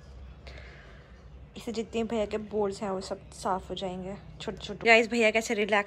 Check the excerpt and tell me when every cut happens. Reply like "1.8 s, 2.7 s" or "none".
1.5 s, 4.8 s